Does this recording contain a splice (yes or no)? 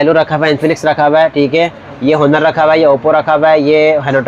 no